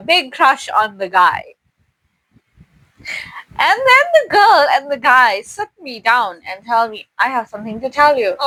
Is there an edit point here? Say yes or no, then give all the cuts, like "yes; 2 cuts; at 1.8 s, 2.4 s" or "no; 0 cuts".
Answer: no; 0 cuts